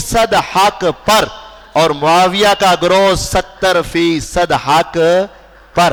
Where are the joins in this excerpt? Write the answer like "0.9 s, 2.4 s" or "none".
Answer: none